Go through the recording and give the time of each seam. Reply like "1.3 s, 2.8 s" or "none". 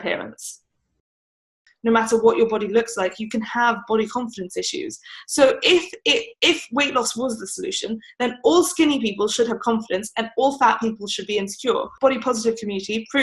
1.4 s, 11.9 s